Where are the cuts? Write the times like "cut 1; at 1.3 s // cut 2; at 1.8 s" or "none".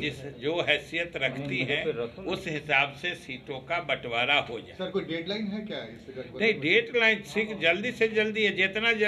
none